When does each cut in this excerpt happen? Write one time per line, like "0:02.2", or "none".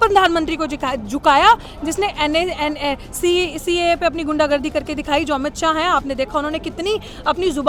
none